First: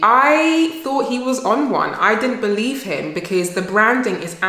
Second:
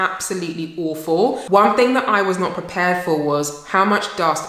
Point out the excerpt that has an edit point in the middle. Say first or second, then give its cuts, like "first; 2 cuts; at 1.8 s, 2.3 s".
second; 1 cut; at 1.4 s